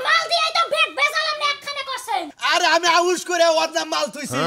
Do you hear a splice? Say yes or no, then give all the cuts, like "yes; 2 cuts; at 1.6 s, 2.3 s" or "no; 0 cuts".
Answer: yes; 1 cut; at 2.4 s